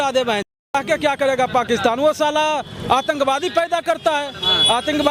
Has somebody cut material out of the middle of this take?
no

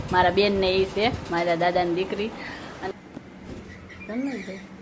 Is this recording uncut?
no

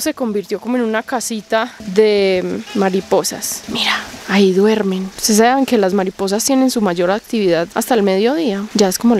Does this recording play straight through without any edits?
yes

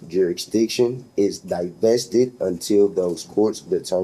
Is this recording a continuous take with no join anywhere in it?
yes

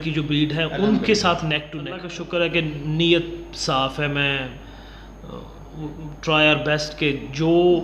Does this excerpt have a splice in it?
yes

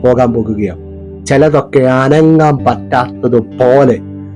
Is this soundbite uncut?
yes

